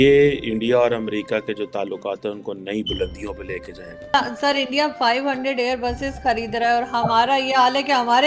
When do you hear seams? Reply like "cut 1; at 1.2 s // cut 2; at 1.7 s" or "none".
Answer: cut 1; at 4.1 s